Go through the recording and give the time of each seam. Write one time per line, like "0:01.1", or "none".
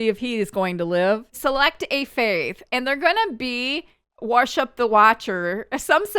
0:01.4